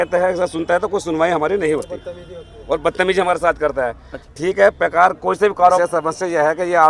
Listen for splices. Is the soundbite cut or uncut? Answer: cut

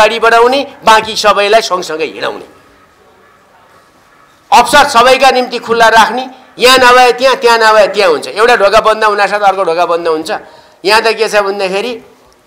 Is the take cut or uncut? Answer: uncut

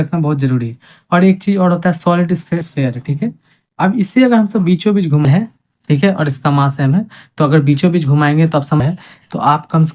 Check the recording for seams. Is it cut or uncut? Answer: cut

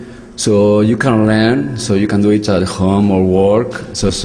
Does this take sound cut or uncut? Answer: cut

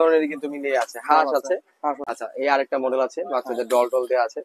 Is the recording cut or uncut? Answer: cut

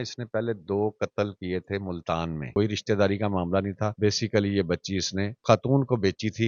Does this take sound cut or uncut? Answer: cut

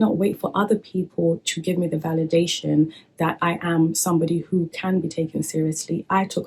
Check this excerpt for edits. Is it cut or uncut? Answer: uncut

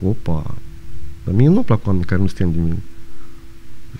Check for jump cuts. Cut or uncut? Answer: uncut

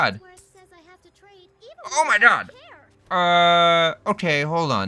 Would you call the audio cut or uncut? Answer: uncut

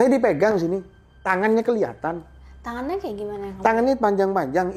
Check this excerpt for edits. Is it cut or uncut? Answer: uncut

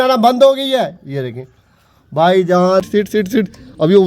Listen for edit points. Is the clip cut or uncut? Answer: cut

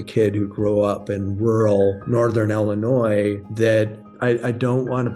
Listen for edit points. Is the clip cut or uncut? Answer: cut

